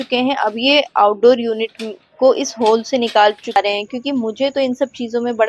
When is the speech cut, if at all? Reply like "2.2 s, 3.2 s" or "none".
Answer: 3.6 s